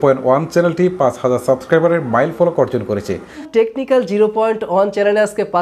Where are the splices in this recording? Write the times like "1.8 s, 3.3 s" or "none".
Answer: 3.4 s